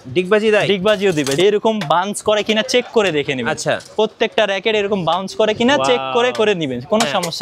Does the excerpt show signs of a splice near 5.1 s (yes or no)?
no